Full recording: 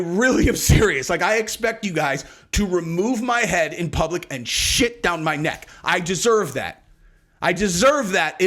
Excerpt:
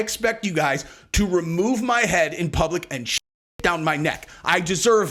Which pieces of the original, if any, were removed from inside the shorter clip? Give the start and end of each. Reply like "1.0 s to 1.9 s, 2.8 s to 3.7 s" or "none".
none